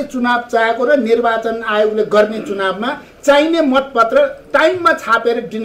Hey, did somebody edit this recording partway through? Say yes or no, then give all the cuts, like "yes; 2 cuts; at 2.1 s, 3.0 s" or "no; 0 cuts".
yes; 1 cut; at 4.4 s